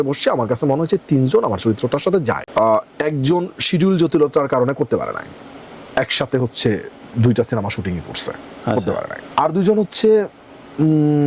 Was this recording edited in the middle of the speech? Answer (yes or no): yes